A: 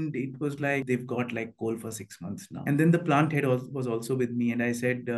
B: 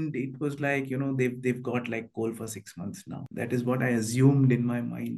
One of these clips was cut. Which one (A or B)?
A